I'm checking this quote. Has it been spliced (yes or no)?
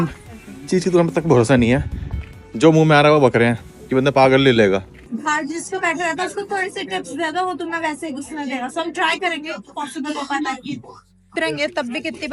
yes